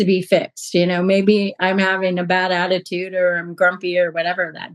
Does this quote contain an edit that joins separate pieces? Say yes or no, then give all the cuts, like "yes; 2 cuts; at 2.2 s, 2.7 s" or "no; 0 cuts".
no; 0 cuts